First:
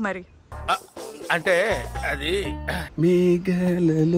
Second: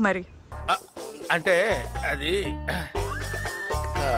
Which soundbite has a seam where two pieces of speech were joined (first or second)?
first